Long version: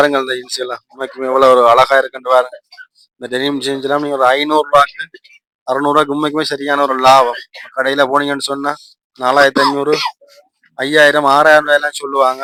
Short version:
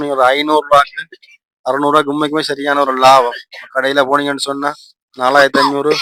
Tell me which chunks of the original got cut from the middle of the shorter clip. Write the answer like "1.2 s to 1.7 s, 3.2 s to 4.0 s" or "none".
none